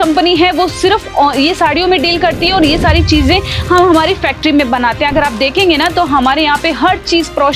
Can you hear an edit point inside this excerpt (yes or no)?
no